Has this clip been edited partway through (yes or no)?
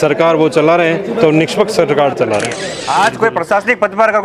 yes